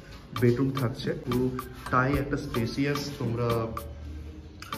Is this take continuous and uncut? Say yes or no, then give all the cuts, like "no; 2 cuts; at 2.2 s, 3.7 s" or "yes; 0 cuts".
no; 1 cut; at 1.2 s